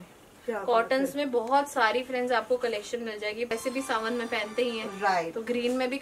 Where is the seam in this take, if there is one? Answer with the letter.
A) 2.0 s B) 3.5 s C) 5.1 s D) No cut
B